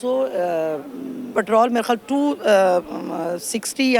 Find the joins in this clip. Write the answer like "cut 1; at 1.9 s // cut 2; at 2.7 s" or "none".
cut 1; at 1.3 s